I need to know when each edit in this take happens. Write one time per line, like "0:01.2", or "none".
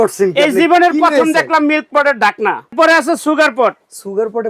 0:02.7